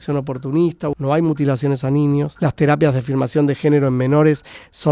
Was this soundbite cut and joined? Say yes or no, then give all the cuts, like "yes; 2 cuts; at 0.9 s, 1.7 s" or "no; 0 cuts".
yes; 2 cuts; at 1.0 s, 2.3 s